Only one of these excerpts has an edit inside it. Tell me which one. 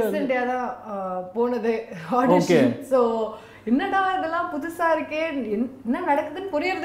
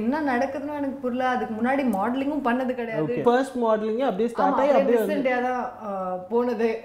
second; 1 cut; at 3.2 s

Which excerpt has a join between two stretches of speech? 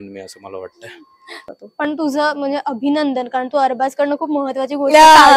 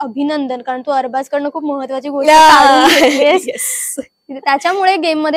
first; 1 cut; at 1.4 s

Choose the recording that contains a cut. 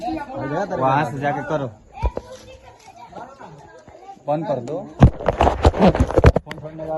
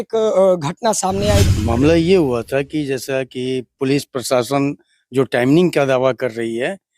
second; 1 cut; at 1.5 s

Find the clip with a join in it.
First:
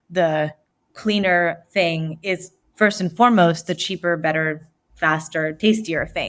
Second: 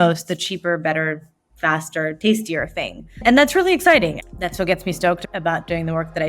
second; 2 cuts; at 4.2 s, 5.2 s

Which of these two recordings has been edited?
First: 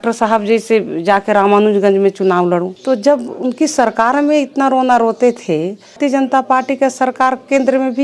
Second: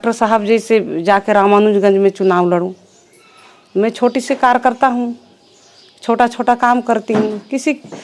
first; 2 cuts; at 2.7 s, 6.0 s

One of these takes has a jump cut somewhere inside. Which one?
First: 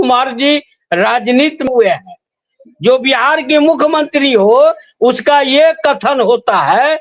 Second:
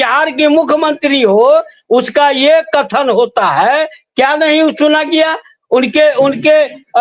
first; 1 cut; at 1.7 s

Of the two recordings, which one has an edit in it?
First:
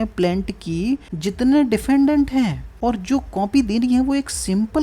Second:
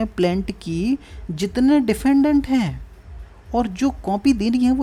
first; 2 cuts; at 1.1 s, 2.6 s

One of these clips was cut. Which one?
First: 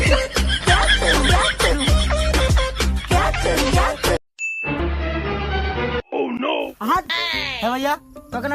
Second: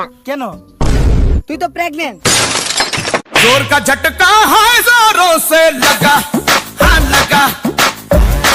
first; 1 cut; at 4.2 s

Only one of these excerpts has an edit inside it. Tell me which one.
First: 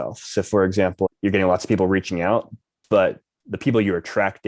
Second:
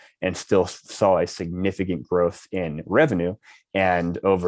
first; 1 cut; at 1.1 s

